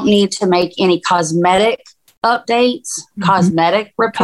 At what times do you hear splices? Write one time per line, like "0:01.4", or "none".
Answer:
none